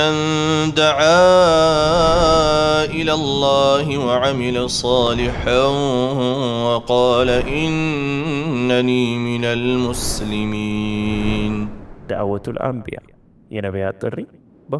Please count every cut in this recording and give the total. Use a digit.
0